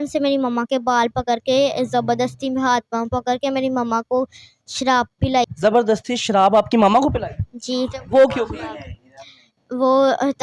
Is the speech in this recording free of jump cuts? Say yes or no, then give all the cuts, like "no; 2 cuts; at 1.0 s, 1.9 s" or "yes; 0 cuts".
yes; 0 cuts